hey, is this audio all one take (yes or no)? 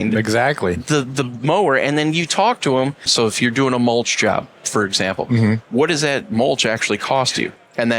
no